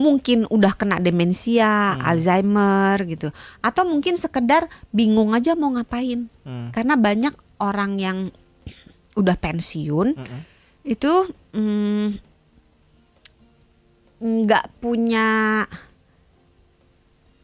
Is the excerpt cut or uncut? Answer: uncut